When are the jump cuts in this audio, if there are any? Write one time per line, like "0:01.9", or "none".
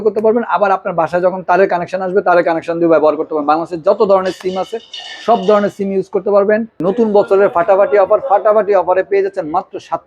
0:06.8